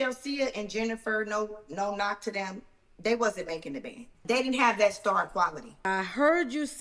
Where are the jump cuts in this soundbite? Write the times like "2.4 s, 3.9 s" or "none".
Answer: 4.2 s, 5.8 s